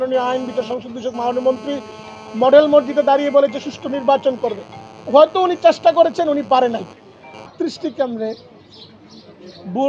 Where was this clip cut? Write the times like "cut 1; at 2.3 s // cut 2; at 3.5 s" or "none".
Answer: cut 1; at 7.5 s